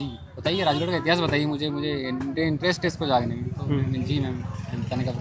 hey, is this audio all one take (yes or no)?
yes